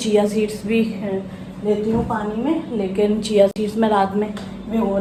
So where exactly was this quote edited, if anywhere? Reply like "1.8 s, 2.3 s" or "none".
none